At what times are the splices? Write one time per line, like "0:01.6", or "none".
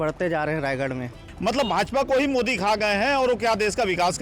0:01.3